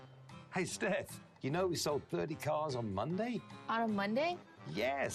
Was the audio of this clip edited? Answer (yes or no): no